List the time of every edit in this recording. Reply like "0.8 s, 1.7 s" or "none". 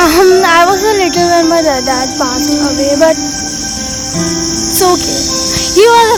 none

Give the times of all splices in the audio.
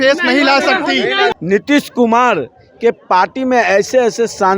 1.3 s

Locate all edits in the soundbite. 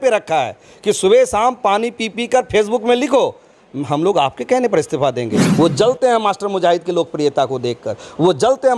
5.4 s

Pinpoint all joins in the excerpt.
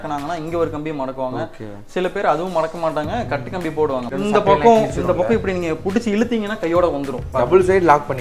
4.1 s, 7.2 s

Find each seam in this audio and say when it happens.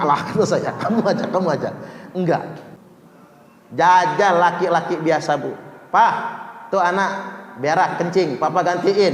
2.8 s

